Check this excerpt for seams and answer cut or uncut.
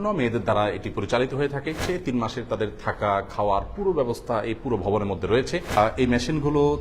cut